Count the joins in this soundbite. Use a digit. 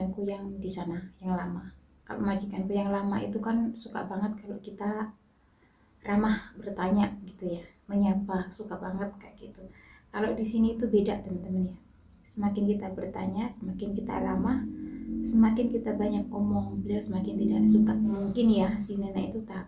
1